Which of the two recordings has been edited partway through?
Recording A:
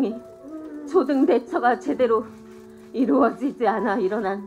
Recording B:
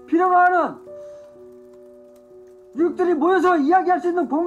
B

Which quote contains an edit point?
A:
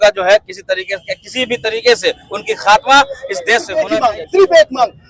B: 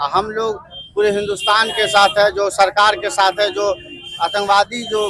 A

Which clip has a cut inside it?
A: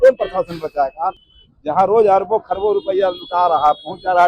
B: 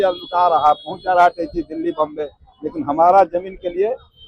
A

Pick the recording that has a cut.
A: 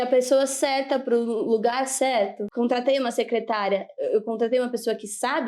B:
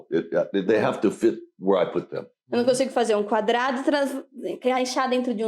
A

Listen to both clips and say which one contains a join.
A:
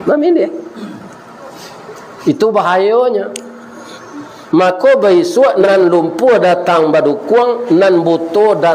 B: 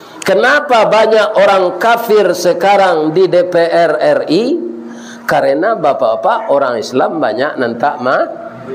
A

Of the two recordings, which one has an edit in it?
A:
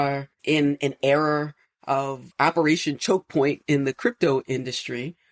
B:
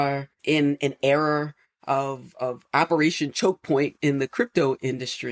A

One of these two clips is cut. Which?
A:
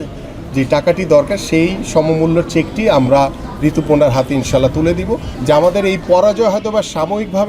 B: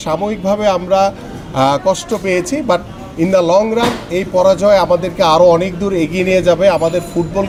A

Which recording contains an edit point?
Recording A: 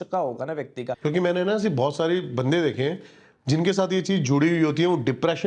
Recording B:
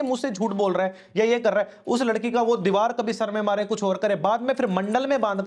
A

